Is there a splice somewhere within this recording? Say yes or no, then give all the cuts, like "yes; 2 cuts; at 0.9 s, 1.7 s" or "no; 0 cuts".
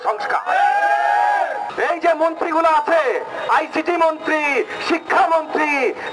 yes; 1 cut; at 1.6 s